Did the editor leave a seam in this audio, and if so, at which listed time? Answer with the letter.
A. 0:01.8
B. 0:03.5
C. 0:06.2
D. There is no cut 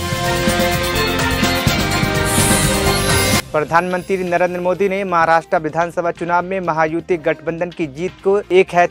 B